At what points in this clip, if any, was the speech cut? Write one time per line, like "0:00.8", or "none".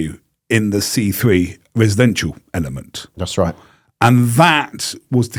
none